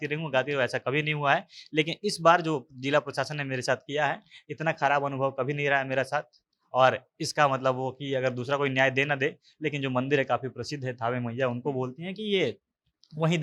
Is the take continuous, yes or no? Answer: yes